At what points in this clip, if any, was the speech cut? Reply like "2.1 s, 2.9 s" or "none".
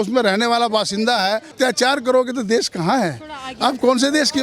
1.5 s